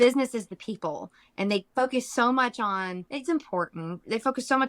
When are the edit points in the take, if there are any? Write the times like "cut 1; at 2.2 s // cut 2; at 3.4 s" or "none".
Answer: cut 1; at 3.0 s